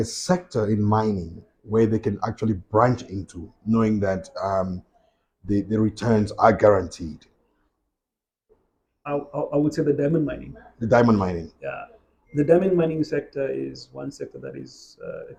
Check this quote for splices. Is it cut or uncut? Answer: uncut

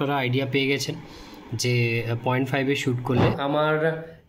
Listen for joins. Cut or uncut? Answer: cut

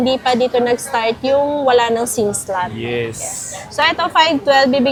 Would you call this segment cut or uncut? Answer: uncut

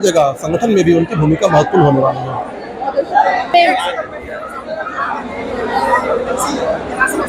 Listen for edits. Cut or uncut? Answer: uncut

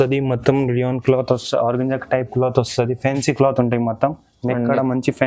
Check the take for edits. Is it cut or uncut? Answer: uncut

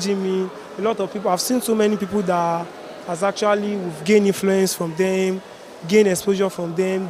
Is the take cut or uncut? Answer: uncut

